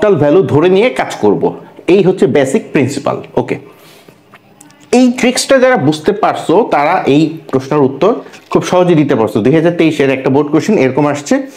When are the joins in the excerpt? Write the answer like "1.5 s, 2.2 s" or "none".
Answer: none